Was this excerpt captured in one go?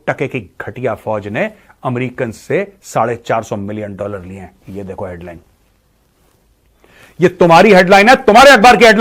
yes; 0 cuts

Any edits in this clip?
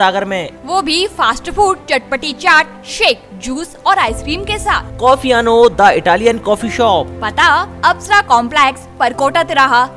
no; 0 cuts

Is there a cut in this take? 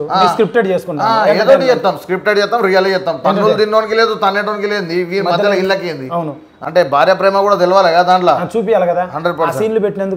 yes; 1 cut; at 6.5 s

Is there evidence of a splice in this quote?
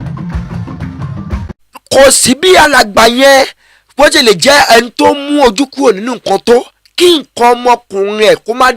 yes; 1 cut; at 1.7 s

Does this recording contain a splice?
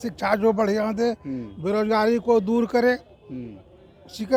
no; 0 cuts

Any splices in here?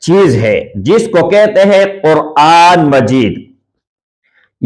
no; 0 cuts

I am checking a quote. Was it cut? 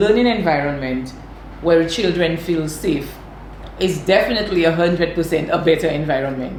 no; 0 cuts

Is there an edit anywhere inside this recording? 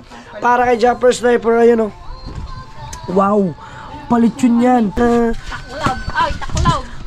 yes; 1 cut; at 4.9 s

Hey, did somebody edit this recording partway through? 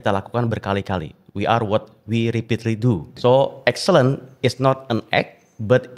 yes; 1 cut; at 3.1 s

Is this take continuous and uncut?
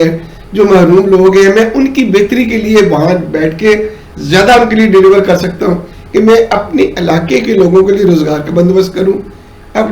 no; 1 cut; at 5.9 s

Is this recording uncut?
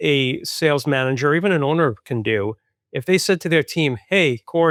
yes; 0 cuts

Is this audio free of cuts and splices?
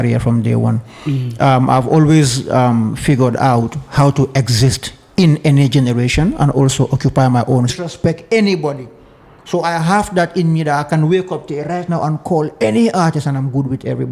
no; 1 cut; at 7.7 s

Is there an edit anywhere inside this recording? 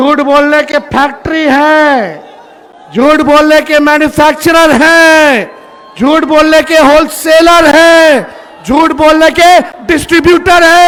no; 0 cuts

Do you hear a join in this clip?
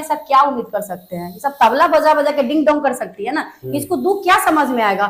no; 0 cuts

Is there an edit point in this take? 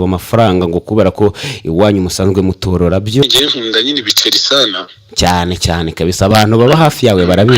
yes; 1 cut; at 3.2 s

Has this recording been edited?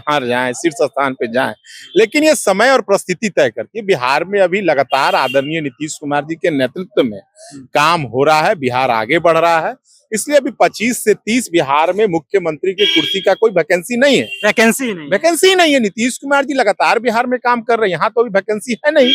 no; 0 cuts

